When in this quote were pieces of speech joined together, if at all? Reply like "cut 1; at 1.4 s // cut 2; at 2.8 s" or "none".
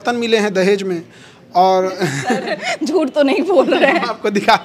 none